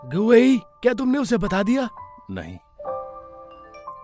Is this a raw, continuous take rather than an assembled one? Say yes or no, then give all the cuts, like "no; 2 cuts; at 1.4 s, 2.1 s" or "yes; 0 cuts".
no; 1 cut; at 2.1 s